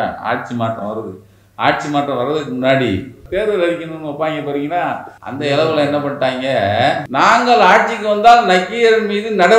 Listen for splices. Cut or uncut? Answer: cut